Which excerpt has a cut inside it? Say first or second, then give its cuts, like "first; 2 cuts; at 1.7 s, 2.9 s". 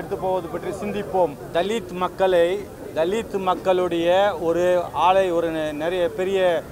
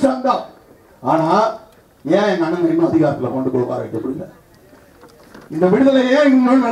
first; 1 cut; at 1.4 s